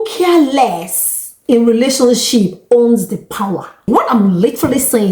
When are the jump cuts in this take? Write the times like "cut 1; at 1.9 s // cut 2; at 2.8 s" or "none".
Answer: cut 1; at 3.8 s